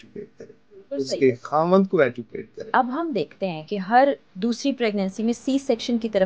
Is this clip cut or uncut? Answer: cut